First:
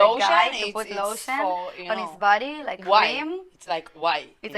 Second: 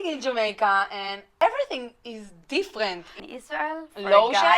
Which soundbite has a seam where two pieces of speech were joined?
second; 2 cuts; at 1.2 s, 3.2 s

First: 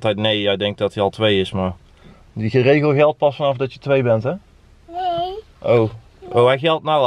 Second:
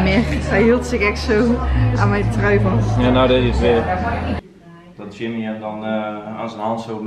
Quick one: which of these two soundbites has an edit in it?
second; 1 cut; at 4.4 s

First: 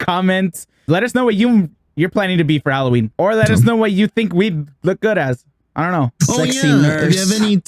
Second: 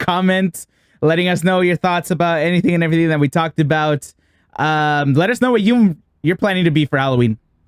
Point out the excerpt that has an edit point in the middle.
first; 2 cuts; at 0.9 s, 3.1 s

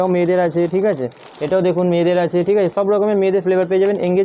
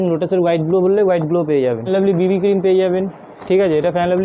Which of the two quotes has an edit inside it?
second; 1 cut; at 1.9 s

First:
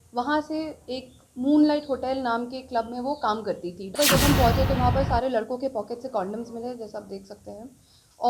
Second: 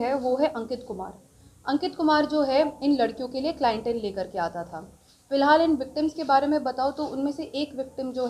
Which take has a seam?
first; 1 cut; at 3.8 s

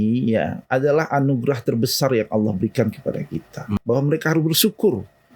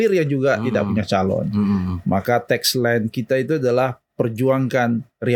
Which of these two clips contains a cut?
first; 1 cut; at 3.7 s

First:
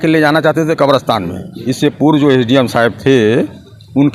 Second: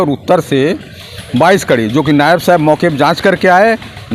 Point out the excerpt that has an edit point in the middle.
first; 1 cut; at 1.6 s

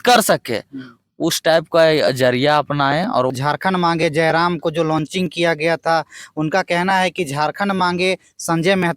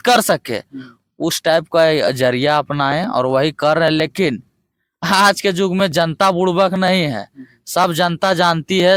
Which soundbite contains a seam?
first; 1 cut; at 3.3 s

